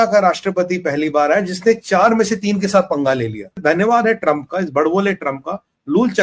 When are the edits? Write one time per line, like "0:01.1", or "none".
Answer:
0:03.5